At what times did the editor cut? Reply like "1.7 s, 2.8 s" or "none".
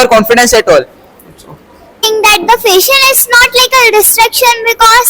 2.1 s